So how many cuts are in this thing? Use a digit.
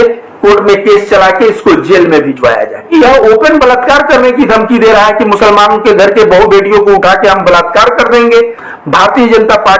2